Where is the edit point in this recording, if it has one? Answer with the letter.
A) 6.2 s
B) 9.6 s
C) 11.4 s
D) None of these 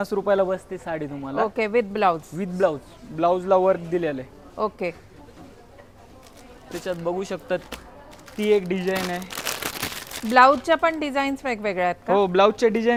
D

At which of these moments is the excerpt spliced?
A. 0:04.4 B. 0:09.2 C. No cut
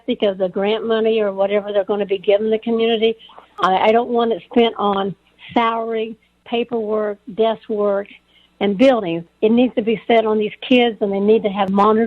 B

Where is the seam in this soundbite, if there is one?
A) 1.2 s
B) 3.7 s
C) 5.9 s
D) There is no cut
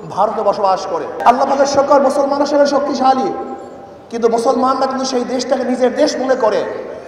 A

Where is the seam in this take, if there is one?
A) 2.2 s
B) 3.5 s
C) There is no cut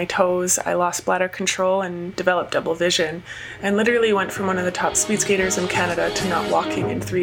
C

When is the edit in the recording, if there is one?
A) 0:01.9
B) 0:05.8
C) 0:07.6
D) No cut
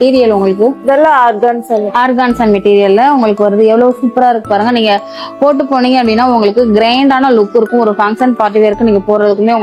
D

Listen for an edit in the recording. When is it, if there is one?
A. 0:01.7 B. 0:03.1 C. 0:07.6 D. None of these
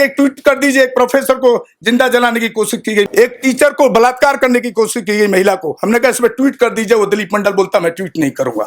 B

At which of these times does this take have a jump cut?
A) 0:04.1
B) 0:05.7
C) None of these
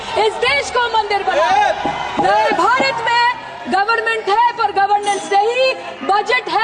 C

